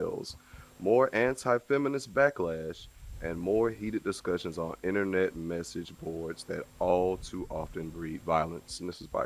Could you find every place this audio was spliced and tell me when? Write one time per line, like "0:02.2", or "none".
none